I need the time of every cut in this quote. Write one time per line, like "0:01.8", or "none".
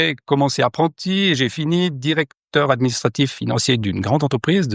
0:03.4